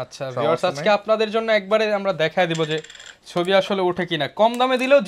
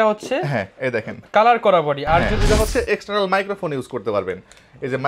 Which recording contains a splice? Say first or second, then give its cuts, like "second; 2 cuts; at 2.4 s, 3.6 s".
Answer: second; 1 cut; at 2.4 s